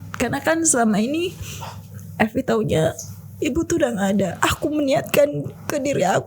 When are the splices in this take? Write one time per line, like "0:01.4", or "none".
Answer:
0:04.3